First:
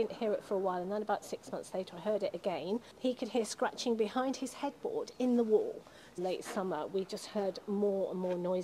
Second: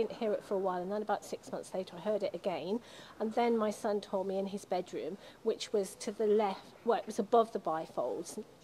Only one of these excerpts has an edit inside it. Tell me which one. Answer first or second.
first